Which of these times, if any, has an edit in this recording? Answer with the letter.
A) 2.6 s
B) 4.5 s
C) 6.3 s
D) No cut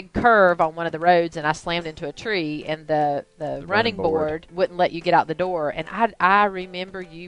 B